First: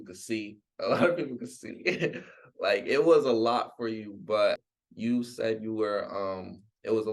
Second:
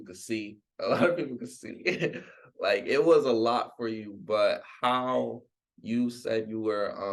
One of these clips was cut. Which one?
first; 1 cut; at 4.7 s

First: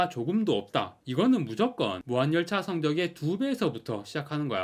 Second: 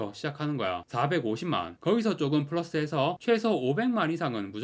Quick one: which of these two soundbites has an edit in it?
first; 1 cut; at 1.0 s

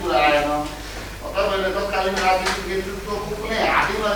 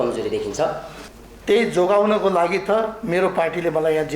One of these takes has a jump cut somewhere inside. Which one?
second; 1 cut; at 0.9 s

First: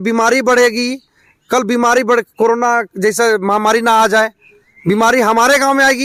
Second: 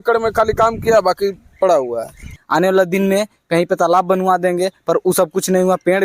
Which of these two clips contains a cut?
second; 1 cut; at 2.3 s

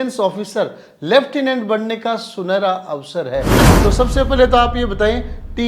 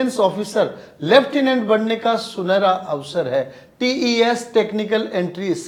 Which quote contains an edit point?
first; 1 cut; at 3.6 s

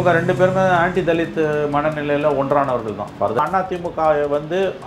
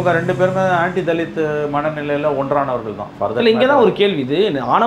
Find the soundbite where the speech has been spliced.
first; 1 cut; at 3.4 s

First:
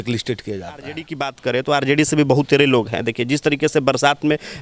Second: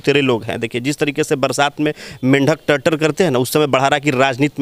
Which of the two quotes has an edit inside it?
first; 1 cut; at 1.2 s

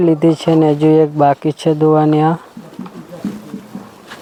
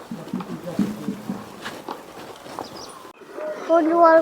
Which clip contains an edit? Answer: second; 1 cut; at 3.3 s

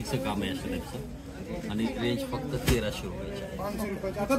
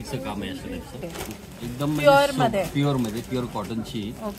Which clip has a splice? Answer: second; 1 cut; at 1.0 s

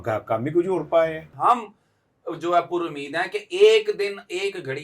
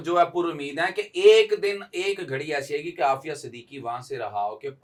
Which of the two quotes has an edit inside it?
first; 1 cut; at 1.3 s

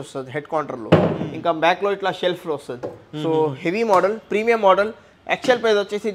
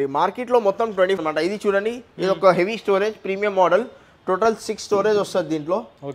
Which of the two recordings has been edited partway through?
second; 1 cut; at 1.2 s

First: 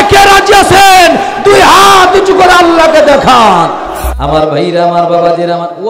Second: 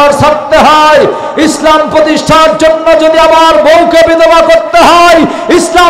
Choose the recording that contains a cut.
first; 1 cut; at 4.2 s

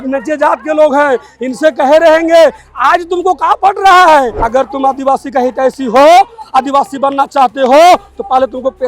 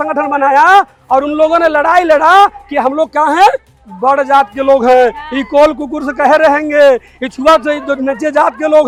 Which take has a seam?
first; 1 cut; at 4.4 s

